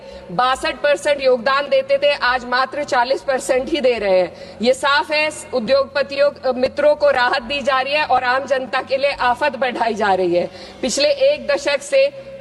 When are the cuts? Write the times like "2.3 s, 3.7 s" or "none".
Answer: none